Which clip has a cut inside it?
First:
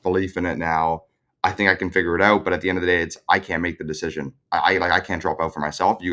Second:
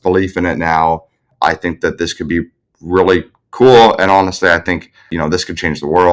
second; 2 cuts; at 1.3 s, 5.1 s

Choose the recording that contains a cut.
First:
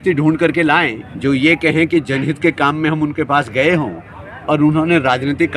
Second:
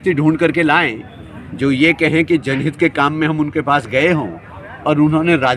first; 1 cut; at 1.0 s

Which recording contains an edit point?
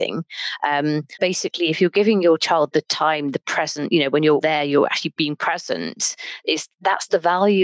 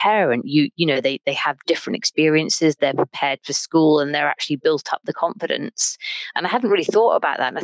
first; 1 cut; at 1.2 s

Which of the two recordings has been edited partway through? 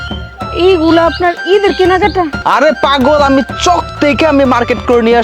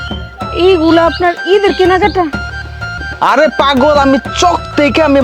first; 1 cut; at 2.3 s

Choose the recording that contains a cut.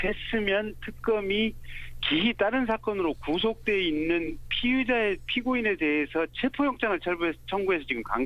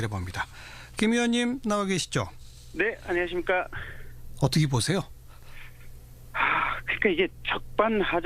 second; 1 cut; at 3.8 s

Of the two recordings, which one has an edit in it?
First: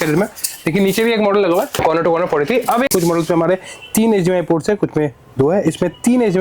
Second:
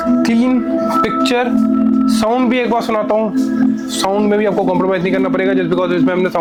first; 1 cut; at 2.9 s

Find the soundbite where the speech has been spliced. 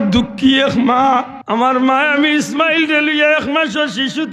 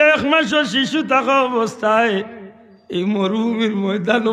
first; 1 cut; at 1.4 s

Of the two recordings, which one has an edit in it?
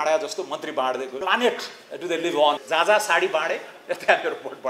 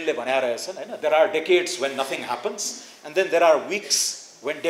first; 2 cuts; at 1.1 s, 2.6 s

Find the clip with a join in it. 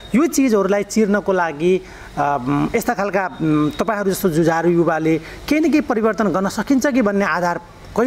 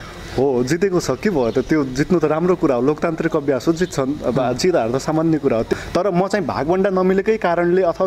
second; 1 cut; at 5.7 s

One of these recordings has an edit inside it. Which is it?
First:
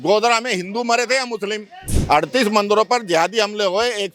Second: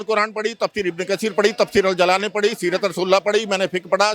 first; 1 cut; at 1.9 s

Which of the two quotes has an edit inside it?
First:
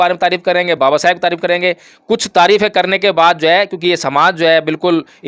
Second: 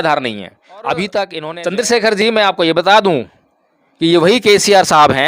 second; 1 cut; at 1.4 s

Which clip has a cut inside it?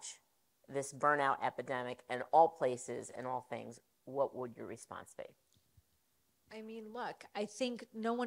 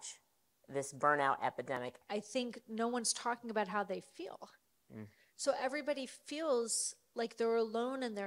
second; 1 cut; at 1.8 s

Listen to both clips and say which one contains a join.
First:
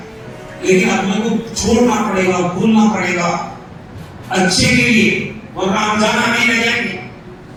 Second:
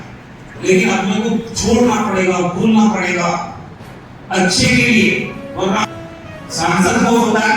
second; 1 cut; at 5.9 s

